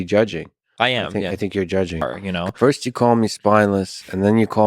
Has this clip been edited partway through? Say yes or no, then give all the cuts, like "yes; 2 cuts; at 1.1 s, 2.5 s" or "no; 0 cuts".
yes; 1 cut; at 2.3 s